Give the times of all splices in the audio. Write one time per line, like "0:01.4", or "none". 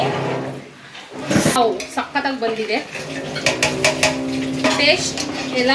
0:01.6

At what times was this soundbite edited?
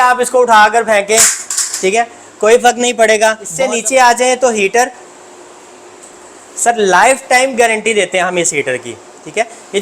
0:03.5

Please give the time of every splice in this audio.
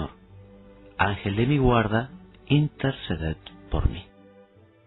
0:03.0

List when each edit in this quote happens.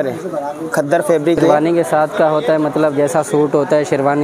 0:01.5

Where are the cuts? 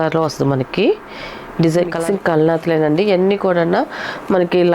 0:02.0

